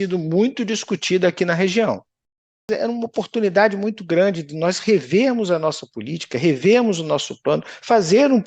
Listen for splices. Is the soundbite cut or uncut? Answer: cut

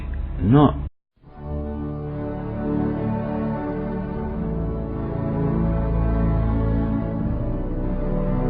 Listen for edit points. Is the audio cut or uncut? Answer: uncut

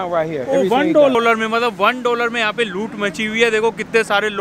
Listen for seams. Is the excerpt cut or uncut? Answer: cut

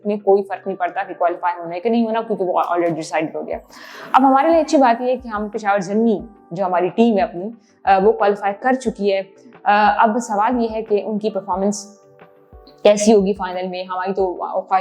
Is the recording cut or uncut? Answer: uncut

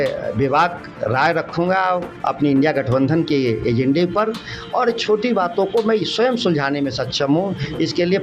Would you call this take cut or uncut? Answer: cut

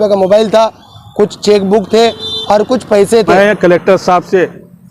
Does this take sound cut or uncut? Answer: cut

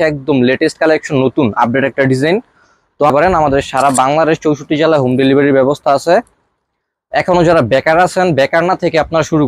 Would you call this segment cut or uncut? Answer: cut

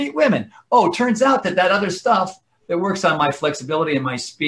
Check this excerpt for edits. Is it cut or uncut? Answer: uncut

